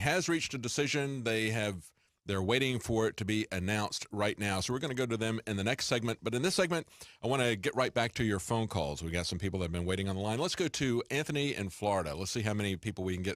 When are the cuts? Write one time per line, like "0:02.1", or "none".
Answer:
0:11.2